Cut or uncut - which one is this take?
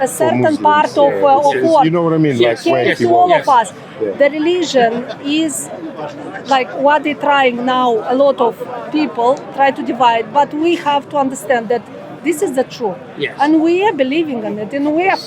uncut